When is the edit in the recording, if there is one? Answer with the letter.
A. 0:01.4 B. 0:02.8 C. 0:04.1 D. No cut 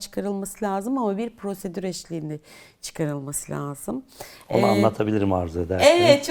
D